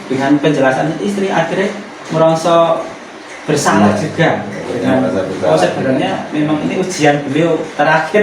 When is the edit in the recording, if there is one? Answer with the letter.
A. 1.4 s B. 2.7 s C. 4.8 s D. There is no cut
D